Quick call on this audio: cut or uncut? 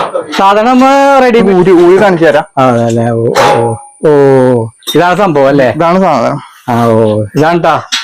cut